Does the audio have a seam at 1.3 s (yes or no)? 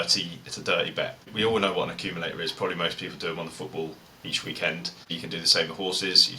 yes